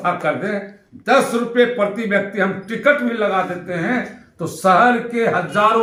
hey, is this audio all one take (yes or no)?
yes